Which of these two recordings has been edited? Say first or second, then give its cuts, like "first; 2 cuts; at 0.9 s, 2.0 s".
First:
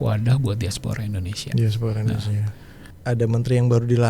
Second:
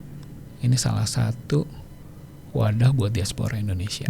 first; 1 cut; at 2.8 s